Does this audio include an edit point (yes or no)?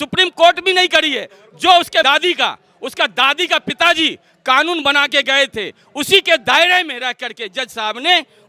yes